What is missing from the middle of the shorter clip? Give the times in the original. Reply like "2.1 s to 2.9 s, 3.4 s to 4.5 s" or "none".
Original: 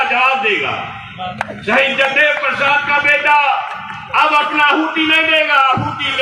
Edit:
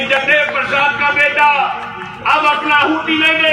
none